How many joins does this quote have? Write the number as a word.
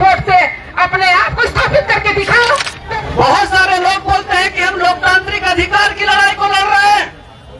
one